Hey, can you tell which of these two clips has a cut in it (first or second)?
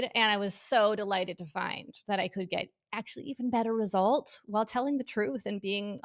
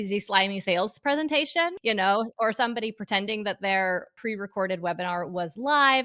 second